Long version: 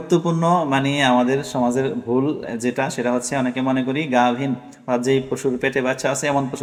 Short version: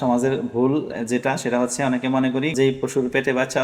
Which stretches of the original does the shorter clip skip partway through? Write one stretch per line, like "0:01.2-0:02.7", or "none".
0:04.1-0:05.0